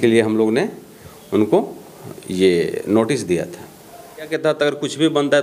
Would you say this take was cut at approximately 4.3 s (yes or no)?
yes